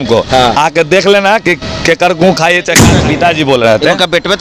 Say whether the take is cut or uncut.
cut